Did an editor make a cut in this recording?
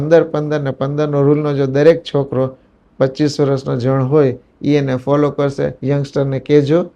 yes; 1 cut; at 5.8 s

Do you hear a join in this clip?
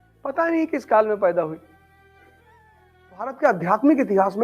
yes; 1 cut; at 3.4 s

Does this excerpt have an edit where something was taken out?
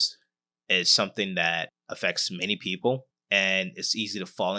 yes; 2 cuts; at 1.8 s, 3.1 s

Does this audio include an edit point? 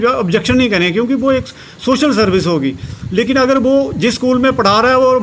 no; 0 cuts

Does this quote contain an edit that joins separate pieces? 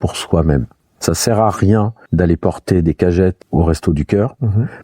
yes; 3 cuts; at 0.9 s, 2.0 s, 3.4 s

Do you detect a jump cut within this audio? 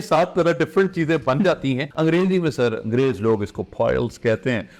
yes; 1 cut; at 1.9 s

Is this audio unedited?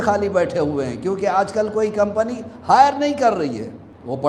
yes; 0 cuts

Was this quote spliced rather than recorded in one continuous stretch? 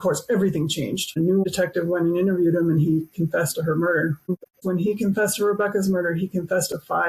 yes; 2 cuts; at 1.5 s, 4.5 s

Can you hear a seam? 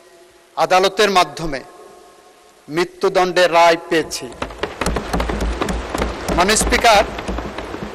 no; 0 cuts

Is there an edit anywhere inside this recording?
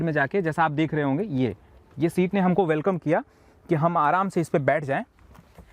no; 0 cuts

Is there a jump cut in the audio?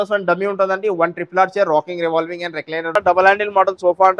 yes; 1 cut; at 2.9 s

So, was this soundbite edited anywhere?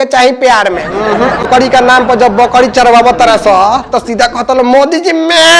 yes; 1 cut; at 1.4 s

